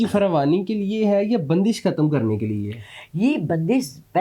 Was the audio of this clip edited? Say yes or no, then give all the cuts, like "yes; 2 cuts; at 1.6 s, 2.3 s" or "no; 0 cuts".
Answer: no; 0 cuts